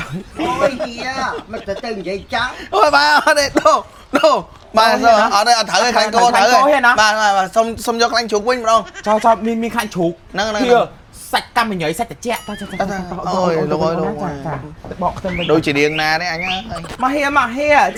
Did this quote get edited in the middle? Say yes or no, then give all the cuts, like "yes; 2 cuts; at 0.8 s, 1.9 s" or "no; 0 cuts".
no; 0 cuts